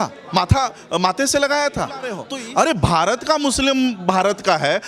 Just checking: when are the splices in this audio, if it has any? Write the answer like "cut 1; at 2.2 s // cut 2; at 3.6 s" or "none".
cut 1; at 2.3 s